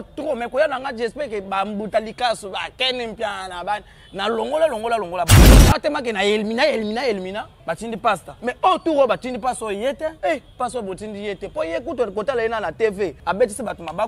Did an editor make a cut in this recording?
yes; 4 cuts; at 5.4 s, 7.8 s, 10.2 s, 13.2 s

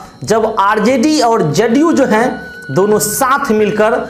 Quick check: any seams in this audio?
no; 0 cuts

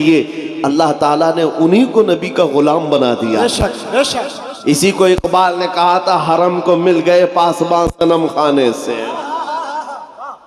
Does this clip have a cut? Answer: no; 0 cuts

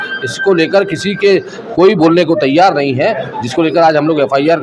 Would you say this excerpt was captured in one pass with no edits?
yes; 0 cuts

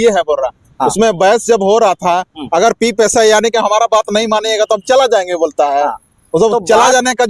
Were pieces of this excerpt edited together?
no; 0 cuts

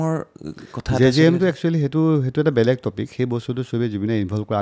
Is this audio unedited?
yes; 0 cuts

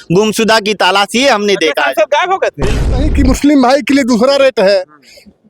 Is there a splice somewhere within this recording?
yes; 1 cut; at 2.9 s

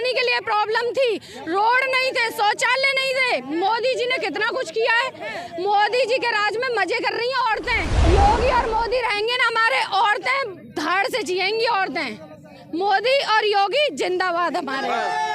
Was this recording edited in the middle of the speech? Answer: yes; 1 cut; at 7.9 s

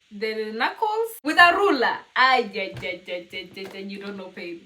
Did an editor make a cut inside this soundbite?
yes; 1 cut; at 1.2 s

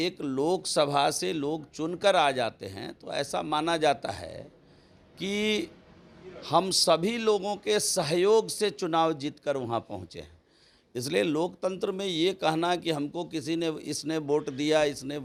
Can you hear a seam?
no; 0 cuts

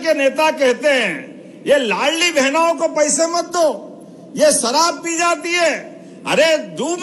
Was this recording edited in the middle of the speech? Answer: no; 0 cuts

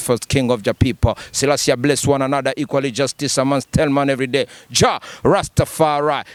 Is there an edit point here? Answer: no; 0 cuts

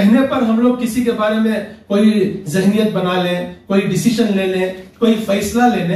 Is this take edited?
no; 0 cuts

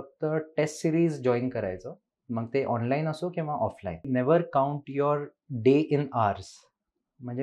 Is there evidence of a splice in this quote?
yes; 1 cut; at 4.0 s

